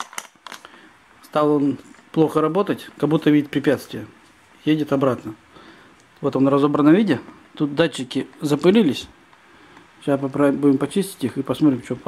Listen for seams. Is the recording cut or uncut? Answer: uncut